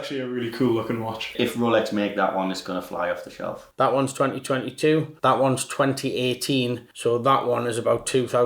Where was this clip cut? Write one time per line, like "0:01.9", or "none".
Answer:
0:01.3
0:03.7